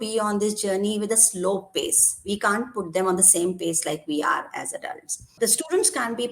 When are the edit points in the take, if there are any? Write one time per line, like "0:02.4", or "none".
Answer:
0:05.3